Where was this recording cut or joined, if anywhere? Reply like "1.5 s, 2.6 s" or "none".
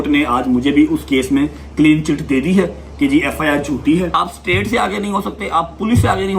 4.1 s